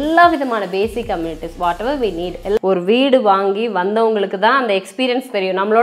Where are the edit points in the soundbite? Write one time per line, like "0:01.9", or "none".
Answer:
0:02.6